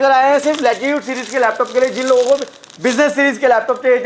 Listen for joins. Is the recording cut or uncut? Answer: uncut